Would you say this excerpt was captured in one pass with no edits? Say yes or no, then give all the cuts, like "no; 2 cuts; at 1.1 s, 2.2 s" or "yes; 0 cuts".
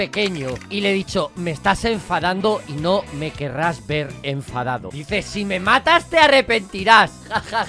no; 1 cut; at 4.9 s